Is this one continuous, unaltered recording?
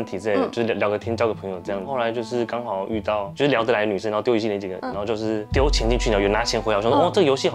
yes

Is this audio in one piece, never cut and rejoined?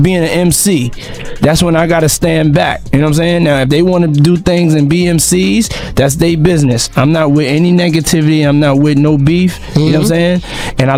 yes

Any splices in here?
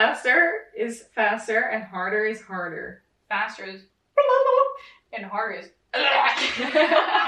no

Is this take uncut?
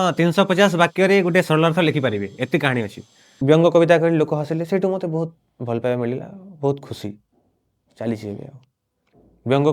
no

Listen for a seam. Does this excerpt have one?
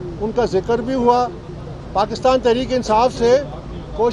no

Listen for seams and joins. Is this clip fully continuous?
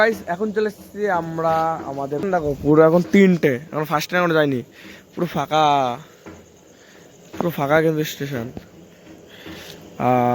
no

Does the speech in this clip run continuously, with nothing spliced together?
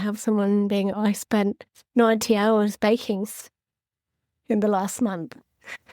no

